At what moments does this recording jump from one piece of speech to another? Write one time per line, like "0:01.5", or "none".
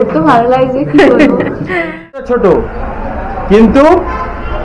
0:02.2